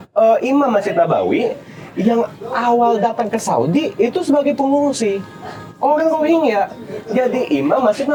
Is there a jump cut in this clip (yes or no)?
no